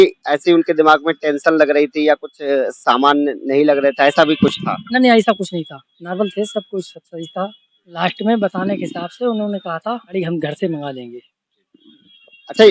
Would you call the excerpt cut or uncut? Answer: uncut